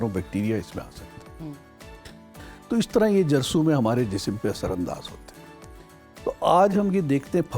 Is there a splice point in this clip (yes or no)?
no